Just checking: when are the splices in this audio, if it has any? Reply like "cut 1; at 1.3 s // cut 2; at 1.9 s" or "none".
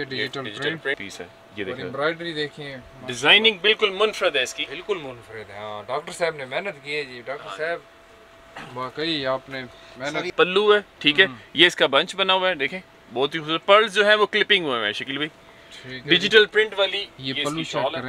cut 1; at 1.0 s // cut 2; at 10.3 s